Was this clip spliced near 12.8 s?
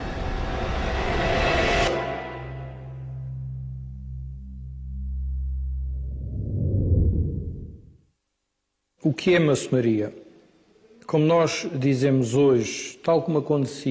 no; 1 cut; at 6.4 s

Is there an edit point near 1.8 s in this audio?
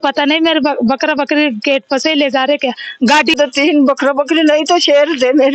no; 1 cut; at 3.4 s

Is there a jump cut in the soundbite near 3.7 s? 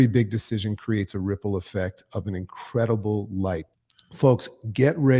yes; 1 cut; at 3.7 s

